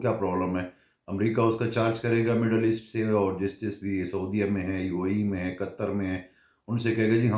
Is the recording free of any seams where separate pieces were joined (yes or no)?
yes